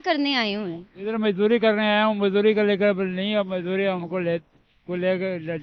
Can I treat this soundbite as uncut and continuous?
yes; 0 cuts

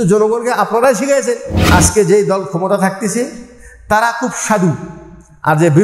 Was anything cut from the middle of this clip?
yes; 1 cut; at 1.5 s

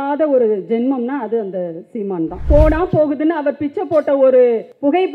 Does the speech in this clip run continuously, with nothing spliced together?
no; 1 cut; at 2.4 s

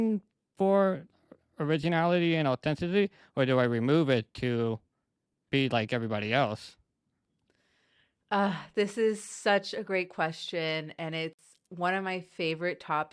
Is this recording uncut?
yes; 0 cuts

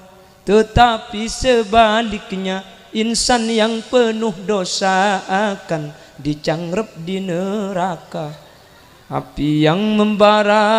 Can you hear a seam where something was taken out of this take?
no; 0 cuts

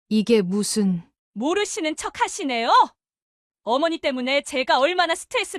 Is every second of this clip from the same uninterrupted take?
yes; 0 cuts

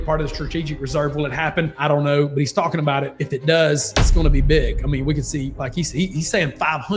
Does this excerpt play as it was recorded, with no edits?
yes; 0 cuts

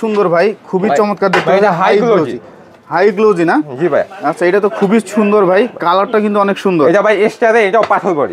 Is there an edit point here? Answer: no; 0 cuts

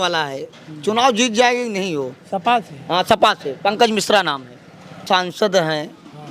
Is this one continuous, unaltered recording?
no; 1 cut; at 5.0 s

